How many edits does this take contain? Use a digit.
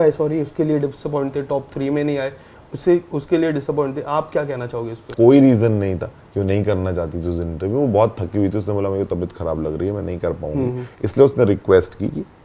1